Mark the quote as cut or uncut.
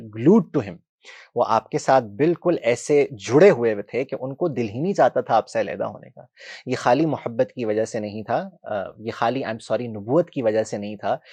uncut